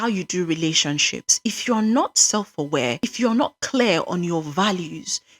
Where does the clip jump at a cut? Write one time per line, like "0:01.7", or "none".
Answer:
0:03.0